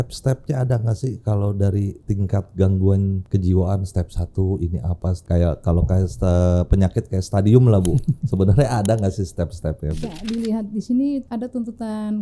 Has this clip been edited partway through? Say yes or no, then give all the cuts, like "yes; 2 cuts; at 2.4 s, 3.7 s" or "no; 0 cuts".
yes; 5 cuts; at 2.0 s, 3.2 s, 5.2 s, 10.1 s, 11.3 s